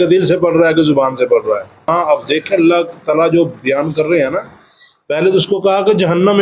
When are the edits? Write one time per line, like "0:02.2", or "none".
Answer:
0:01.9